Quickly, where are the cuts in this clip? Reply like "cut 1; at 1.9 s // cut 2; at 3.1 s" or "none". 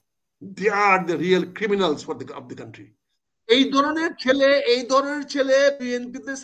cut 1; at 3.2 s